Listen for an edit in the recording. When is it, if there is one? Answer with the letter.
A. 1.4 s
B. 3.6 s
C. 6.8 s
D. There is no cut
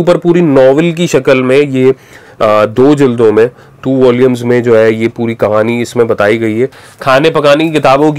C